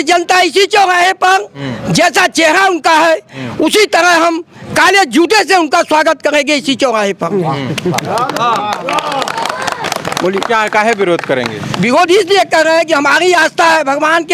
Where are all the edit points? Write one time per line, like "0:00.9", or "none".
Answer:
none